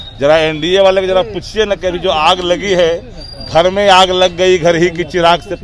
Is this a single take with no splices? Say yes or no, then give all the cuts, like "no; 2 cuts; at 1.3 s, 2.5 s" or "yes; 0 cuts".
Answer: yes; 0 cuts